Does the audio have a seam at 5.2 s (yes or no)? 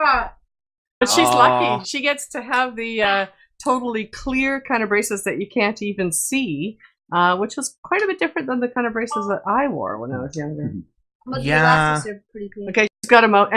no